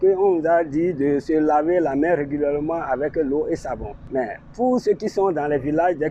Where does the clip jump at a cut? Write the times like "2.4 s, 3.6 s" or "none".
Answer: 3.9 s